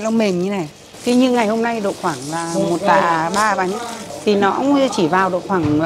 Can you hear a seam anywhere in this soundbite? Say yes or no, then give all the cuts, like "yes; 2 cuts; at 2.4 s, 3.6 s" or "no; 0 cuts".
yes; 1 cut; at 1.0 s